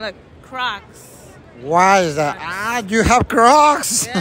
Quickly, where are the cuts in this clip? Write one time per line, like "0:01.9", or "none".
none